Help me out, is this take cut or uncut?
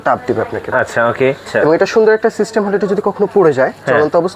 cut